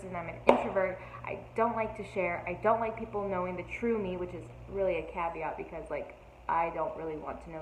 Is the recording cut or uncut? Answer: uncut